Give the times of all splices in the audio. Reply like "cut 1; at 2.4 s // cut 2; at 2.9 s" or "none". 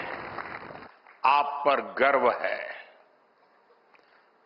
none